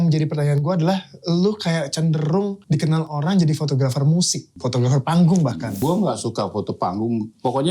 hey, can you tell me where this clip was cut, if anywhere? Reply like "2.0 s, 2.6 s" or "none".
2.6 s, 4.6 s, 5.8 s